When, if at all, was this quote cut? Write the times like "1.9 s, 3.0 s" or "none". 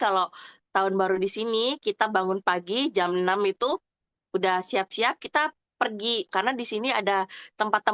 6.3 s